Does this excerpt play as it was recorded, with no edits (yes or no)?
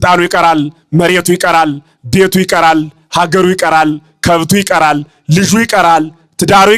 yes